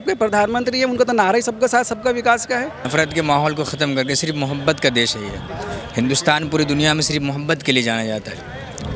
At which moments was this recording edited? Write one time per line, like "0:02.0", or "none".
0:02.8